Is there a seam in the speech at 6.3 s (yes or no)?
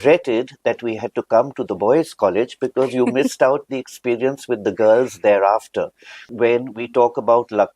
yes